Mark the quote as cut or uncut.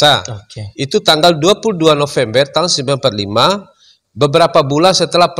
uncut